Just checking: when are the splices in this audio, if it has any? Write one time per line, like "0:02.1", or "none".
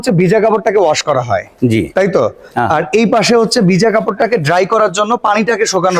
none